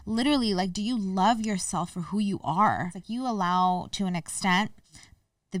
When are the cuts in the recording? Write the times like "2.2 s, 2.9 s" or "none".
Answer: 3.0 s